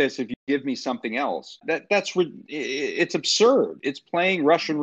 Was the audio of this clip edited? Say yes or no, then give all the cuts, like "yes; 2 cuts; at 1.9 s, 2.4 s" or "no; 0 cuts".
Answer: yes; 2 cuts; at 1.6 s, 3.8 s